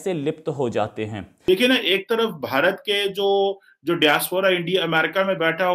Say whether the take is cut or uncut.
cut